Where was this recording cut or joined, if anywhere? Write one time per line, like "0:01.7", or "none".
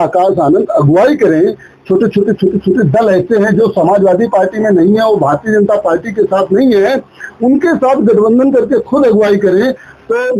none